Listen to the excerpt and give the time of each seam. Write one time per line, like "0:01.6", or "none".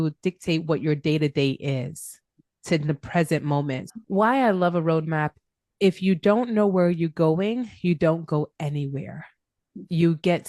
0:03.8